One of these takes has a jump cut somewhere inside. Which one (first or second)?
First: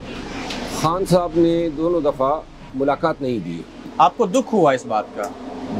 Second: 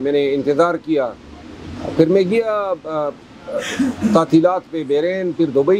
first